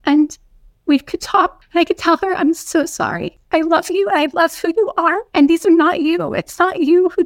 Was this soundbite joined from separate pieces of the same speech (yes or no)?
yes